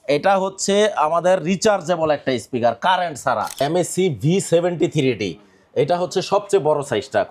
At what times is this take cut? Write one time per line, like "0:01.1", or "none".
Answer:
0:03.5

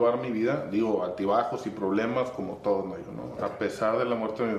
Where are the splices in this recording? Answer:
0:03.4

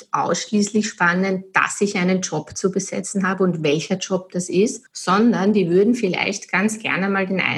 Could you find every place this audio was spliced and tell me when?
0:04.9

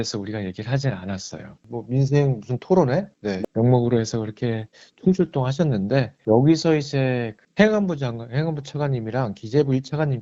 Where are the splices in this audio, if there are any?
0:01.6

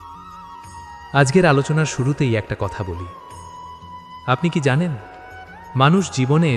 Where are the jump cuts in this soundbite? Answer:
0:01.1

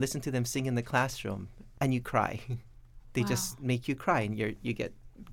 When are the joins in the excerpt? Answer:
none

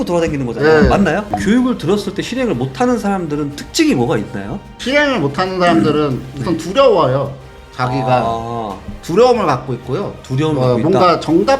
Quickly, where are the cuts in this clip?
0:01.2

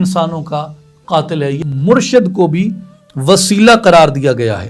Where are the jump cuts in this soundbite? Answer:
0:01.6

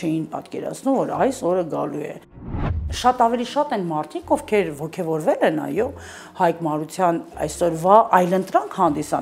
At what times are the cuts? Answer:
0:02.8
0:07.3

